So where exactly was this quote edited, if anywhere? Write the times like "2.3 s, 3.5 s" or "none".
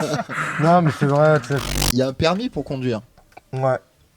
1.6 s

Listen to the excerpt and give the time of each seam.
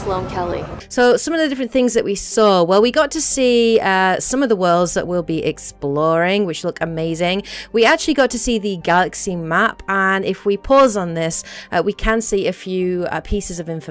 none

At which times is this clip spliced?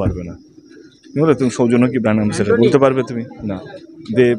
none

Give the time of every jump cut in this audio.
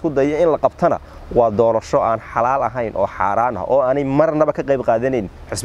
none

